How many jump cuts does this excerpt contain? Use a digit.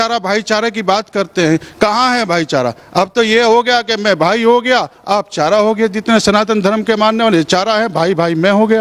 0